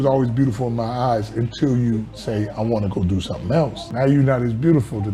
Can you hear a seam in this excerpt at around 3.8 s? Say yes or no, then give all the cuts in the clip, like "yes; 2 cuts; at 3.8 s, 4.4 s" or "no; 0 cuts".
yes; 1 cut; at 3.8 s